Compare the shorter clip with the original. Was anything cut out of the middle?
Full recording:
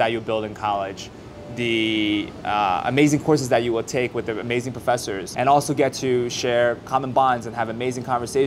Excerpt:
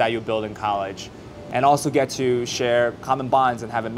yes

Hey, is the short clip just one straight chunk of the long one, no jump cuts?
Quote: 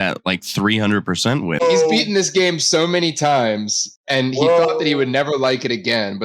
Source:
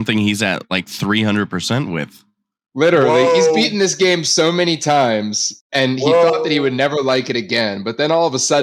no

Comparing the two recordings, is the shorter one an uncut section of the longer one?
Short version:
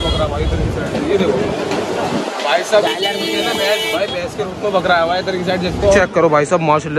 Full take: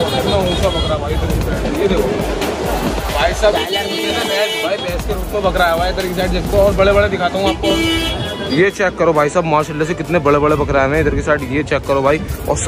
no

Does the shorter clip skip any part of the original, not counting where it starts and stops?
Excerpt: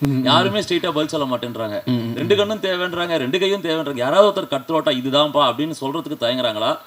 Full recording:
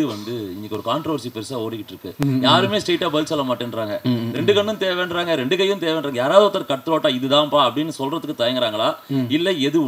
no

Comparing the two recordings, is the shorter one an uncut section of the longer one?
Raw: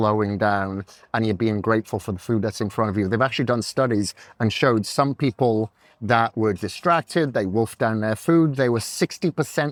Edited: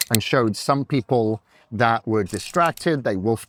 yes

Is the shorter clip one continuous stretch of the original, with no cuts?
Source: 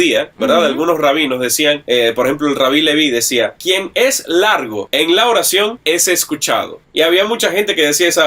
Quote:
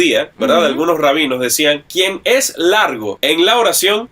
no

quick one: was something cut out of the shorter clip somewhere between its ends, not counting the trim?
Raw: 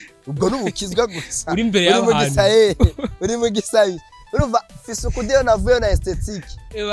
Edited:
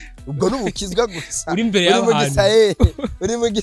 no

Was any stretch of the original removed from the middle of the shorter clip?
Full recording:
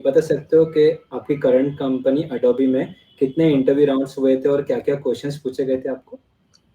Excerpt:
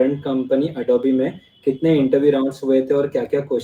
no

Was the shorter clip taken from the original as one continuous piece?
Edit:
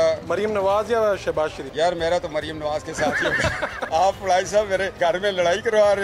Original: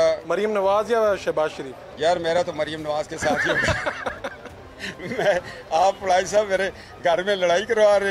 no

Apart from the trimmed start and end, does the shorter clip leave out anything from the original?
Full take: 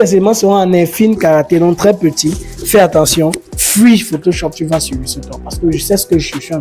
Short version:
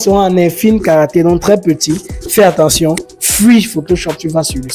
no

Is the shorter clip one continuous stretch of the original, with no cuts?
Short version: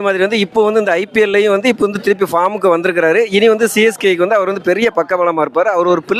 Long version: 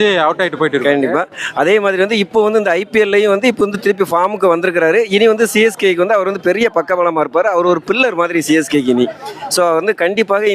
yes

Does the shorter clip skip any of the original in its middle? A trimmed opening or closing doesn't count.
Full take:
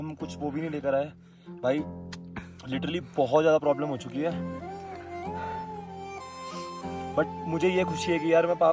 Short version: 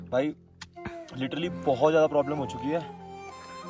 yes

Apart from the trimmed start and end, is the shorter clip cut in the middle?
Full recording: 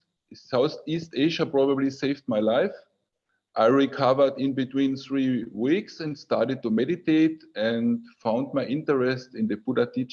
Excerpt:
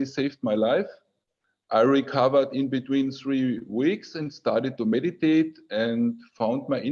no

